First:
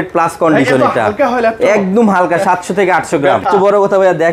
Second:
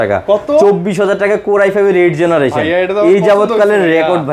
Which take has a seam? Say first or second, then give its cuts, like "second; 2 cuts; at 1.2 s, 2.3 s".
first; 1 cut; at 3.4 s